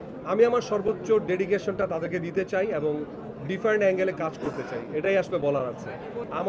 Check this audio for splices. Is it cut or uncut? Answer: uncut